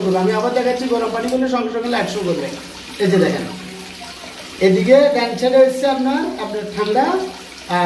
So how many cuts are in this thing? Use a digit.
0